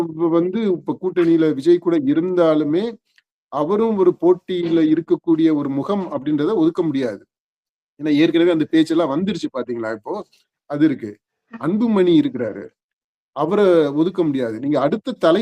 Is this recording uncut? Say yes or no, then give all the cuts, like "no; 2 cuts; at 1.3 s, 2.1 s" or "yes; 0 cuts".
yes; 0 cuts